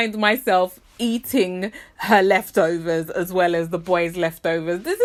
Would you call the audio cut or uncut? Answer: uncut